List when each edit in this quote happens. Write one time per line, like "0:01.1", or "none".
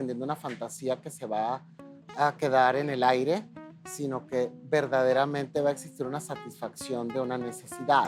none